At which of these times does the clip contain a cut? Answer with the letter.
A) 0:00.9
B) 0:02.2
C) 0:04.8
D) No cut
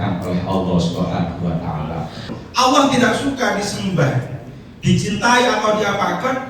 B